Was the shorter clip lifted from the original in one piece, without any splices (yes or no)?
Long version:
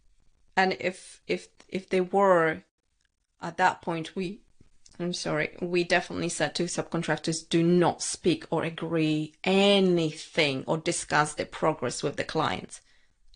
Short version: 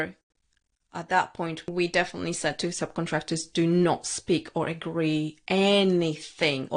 no